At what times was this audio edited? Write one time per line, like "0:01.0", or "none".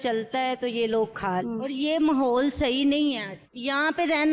0:01.4